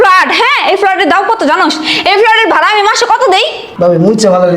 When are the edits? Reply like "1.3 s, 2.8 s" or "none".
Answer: 3.6 s

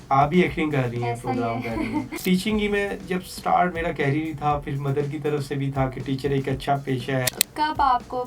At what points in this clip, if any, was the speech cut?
2.2 s, 7.3 s

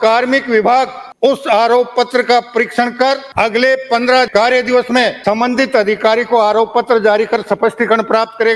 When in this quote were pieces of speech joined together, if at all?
1.0 s, 3.3 s, 4.3 s, 5.2 s

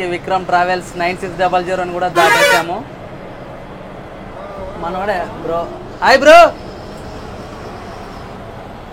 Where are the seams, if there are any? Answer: none

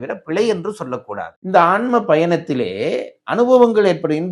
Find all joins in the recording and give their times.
1.3 s

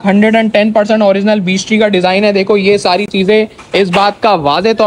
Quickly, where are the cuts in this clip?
none

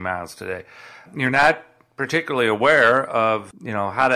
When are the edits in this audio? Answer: 1.1 s

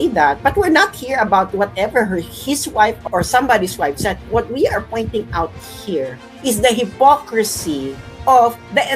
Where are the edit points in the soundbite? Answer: none

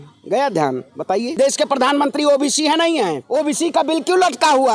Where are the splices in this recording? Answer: 1.3 s, 3.2 s

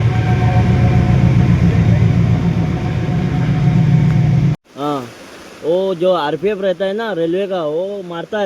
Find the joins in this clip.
4.7 s

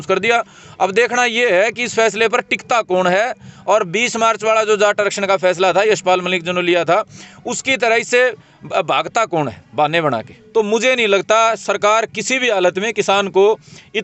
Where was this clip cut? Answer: 10.3 s

